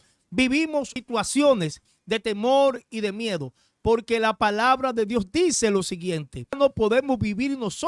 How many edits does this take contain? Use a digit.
2